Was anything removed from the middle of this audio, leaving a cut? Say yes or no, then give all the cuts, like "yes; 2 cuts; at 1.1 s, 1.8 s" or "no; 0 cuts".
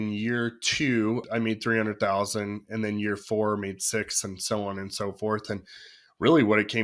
yes; 1 cut; at 1.2 s